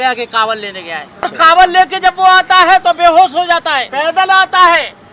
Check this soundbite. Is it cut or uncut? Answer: cut